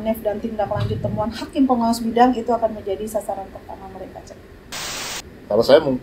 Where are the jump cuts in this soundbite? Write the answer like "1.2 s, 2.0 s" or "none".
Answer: 4.9 s